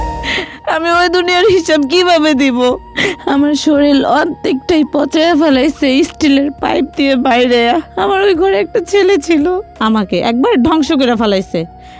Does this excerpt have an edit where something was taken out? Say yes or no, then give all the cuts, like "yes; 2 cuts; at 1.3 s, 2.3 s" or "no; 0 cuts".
yes; 2 cuts; at 3.0 s, 9.7 s